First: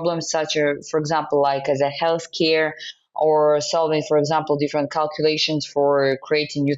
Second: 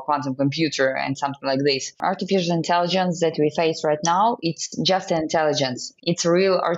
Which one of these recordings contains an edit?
second; 2 cuts; at 2.0 s, 5.9 s

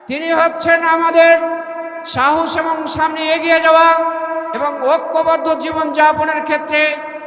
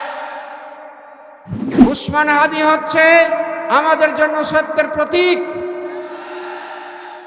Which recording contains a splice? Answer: second; 1 cut; at 1.4 s

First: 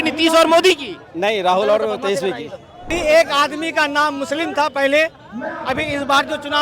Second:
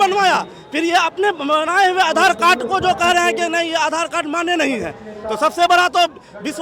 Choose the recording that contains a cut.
first; 1 cut; at 2.9 s

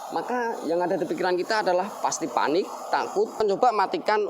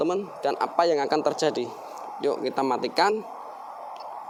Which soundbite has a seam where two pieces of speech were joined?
first; 1 cut; at 3.4 s

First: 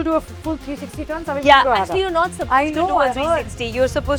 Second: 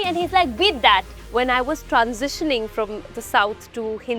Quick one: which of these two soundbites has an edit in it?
second; 1 cut; at 1.2 s

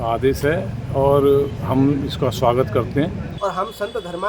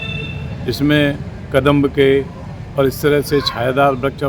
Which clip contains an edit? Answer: first; 1 cut; at 3.3 s

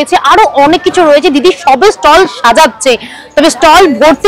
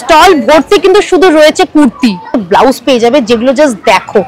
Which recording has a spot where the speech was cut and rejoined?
second; 1 cut; at 2.4 s

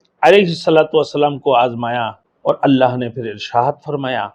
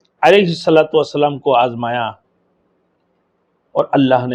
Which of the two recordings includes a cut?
first; 1 cut; at 2.2 s

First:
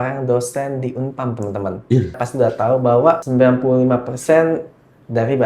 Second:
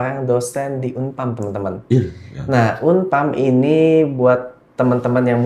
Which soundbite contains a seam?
first; 2 cuts; at 2.2 s, 3.2 s

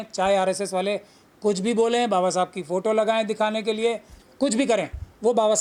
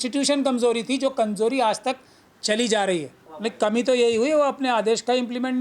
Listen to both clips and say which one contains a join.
second; 1 cut; at 3.2 s

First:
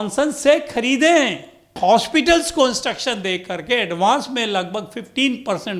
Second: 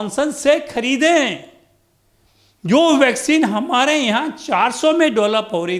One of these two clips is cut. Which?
first; 1 cut; at 1.8 s

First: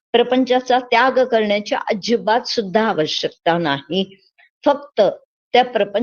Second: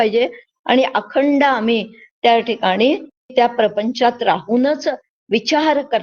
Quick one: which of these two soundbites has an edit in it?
second; 1 cut; at 3.3 s

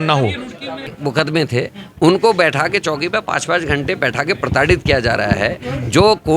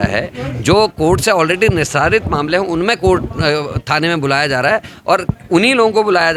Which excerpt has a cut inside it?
first; 1 cut; at 0.9 s

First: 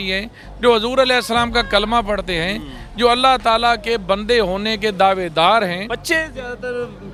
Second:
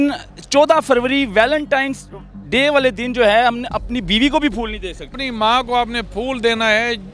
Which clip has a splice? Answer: second; 1 cut; at 5.1 s

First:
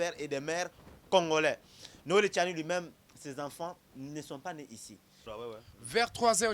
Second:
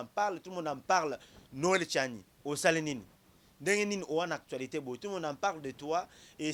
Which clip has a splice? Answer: first; 1 cut; at 5.2 s

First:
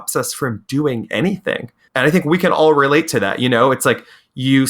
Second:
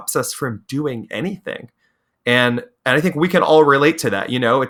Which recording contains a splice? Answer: first; 1 cut; at 1.8 s

